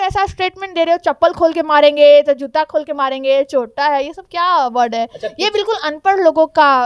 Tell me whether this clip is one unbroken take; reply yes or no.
yes